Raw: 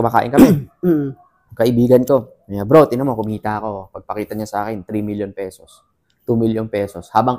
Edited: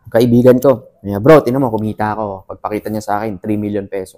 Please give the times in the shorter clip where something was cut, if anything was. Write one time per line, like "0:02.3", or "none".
none